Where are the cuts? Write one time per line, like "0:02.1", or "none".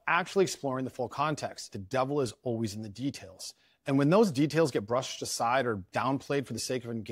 0:01.7